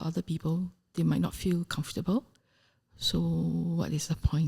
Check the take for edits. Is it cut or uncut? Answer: uncut